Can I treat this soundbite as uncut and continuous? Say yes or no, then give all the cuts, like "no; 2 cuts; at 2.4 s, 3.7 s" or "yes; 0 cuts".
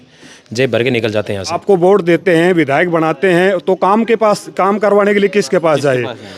no; 1 cut; at 1.5 s